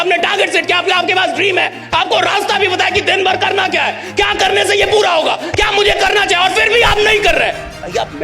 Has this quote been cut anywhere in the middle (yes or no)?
no